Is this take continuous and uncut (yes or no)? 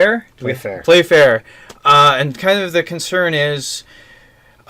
no